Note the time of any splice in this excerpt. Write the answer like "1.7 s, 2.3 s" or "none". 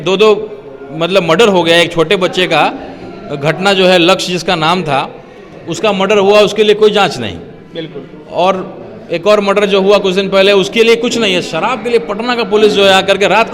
none